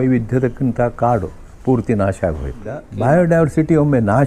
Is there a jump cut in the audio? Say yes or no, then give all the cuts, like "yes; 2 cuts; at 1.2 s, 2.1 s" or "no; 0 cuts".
yes; 1 cut; at 2.9 s